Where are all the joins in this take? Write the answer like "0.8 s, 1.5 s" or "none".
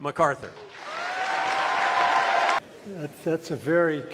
2.6 s